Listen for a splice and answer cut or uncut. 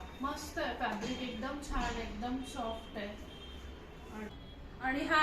cut